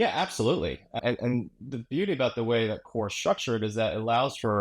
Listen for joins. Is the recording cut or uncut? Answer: cut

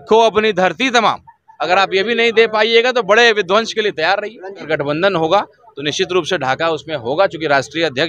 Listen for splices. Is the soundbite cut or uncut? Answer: cut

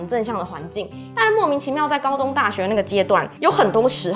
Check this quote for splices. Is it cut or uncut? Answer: uncut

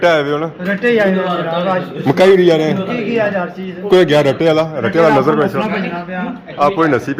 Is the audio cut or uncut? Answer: uncut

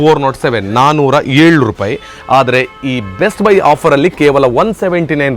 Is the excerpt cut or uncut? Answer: uncut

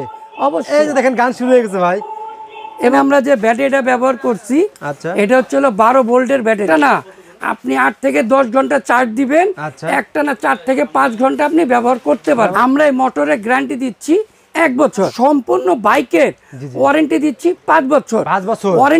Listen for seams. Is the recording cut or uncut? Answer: cut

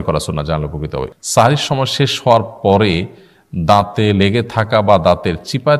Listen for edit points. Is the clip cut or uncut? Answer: cut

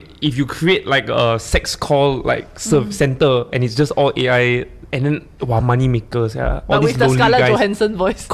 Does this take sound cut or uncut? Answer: uncut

